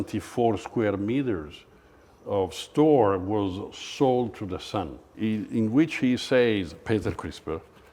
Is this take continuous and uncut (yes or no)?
no